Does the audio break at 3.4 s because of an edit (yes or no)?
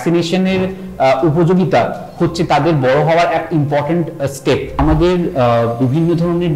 no